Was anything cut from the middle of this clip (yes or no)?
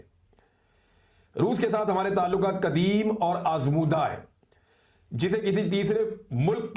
no